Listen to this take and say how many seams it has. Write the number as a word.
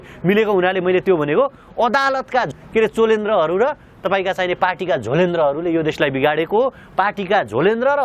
one